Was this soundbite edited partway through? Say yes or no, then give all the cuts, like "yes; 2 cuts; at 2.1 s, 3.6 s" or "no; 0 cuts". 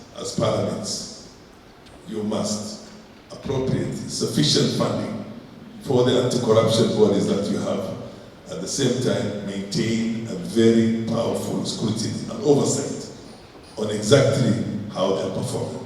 no; 0 cuts